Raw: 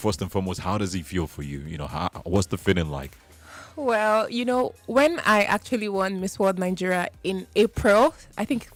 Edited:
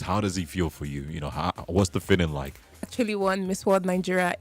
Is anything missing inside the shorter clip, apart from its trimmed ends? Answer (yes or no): yes